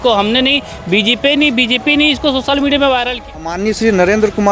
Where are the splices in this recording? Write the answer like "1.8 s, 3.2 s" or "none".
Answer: 3.5 s

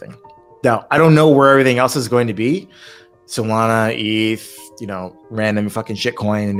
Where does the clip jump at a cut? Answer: none

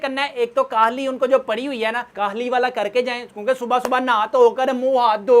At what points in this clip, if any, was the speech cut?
none

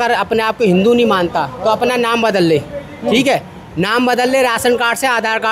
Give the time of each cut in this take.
none

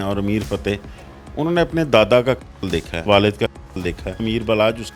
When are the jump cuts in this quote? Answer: 3.0 s, 4.2 s

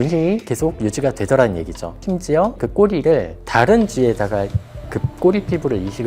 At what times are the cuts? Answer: 2.3 s

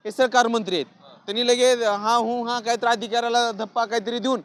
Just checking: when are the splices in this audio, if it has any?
none

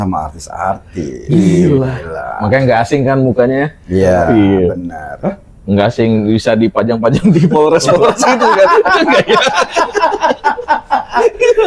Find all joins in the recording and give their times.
none

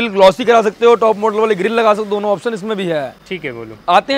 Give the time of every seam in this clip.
none

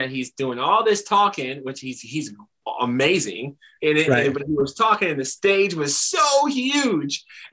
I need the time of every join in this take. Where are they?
3.7 s

